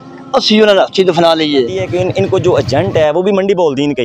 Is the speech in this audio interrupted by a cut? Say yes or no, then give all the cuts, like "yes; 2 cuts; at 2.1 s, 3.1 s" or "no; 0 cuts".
yes; 1 cut; at 1.8 s